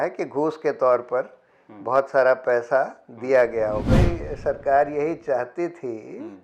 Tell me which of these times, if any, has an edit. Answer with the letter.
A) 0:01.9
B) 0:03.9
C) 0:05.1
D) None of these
B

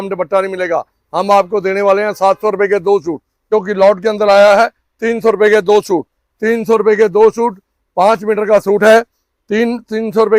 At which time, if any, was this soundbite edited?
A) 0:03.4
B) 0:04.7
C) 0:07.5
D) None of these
A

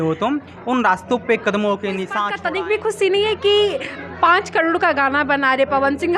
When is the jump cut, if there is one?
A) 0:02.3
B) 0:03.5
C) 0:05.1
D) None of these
A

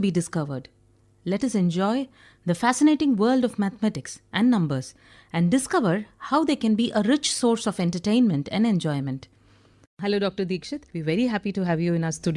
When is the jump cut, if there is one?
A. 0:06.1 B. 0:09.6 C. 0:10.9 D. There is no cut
B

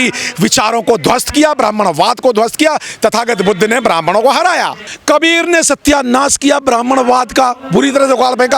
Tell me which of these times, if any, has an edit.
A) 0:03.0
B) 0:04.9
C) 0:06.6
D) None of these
B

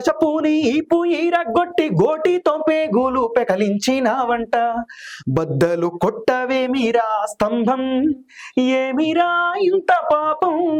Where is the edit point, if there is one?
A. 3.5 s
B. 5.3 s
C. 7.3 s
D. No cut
D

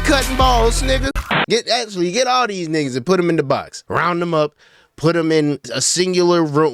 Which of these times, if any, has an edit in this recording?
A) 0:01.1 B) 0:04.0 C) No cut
A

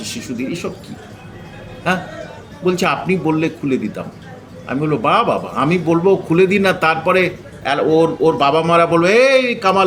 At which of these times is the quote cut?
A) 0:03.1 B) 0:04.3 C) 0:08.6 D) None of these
D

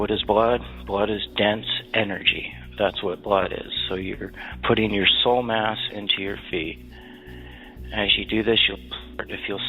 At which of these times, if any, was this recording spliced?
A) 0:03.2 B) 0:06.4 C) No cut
C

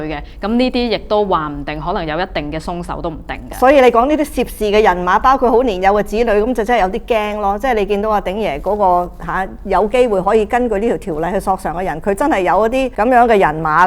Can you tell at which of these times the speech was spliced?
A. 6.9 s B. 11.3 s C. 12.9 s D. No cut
C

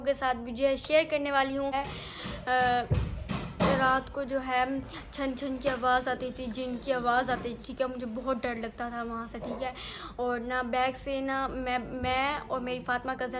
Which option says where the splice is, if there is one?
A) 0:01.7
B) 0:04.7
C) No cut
A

